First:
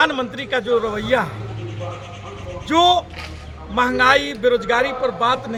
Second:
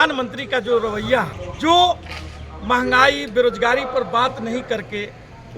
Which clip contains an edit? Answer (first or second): second